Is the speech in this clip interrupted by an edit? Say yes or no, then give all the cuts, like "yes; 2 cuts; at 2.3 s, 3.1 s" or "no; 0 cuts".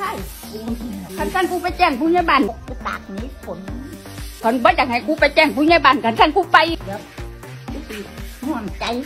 no; 0 cuts